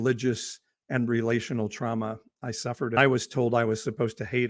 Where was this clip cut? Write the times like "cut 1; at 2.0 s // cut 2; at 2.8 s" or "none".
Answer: cut 1; at 3.0 s